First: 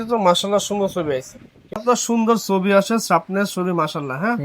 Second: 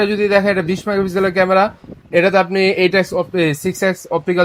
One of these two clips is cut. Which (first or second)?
first